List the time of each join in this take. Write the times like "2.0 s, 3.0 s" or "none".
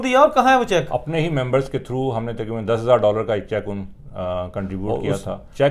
1.0 s, 4.9 s